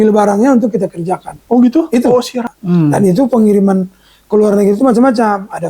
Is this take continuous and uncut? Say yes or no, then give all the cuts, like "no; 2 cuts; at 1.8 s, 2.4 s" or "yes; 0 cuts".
no; 1 cut; at 2.3 s